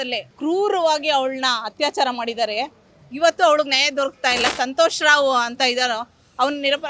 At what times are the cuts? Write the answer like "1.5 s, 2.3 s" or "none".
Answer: 4.5 s